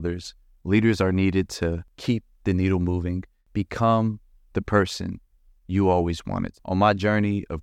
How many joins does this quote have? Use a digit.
3